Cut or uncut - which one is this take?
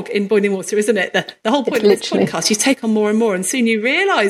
uncut